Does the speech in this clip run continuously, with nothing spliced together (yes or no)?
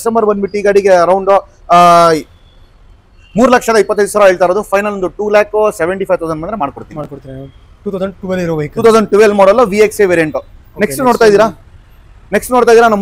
yes